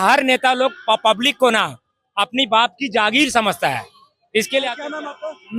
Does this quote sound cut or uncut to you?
uncut